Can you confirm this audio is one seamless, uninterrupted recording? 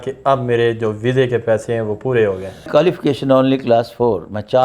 no; 1 cut; at 2.5 s

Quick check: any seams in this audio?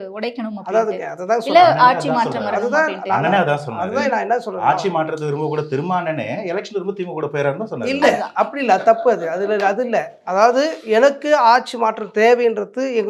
no; 0 cuts

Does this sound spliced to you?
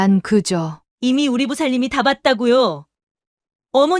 no; 0 cuts

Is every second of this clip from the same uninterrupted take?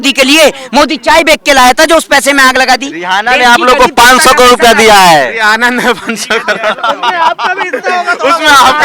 yes; 0 cuts

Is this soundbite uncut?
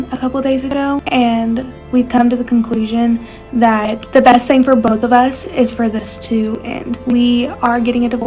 no; 3 cuts; at 1.0 s, 4.0 s, 7.0 s

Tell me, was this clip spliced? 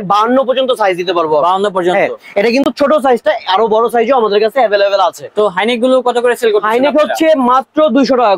no; 0 cuts

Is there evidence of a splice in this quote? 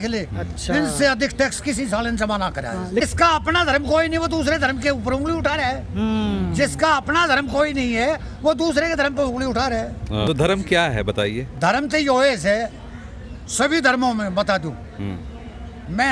yes; 2 cuts; at 3.0 s, 10.3 s

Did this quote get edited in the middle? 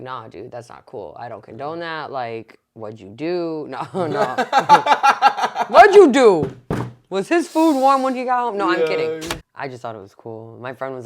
yes; 1 cut; at 9.4 s

